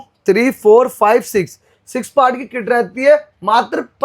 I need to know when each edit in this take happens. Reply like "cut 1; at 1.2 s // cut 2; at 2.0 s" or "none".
none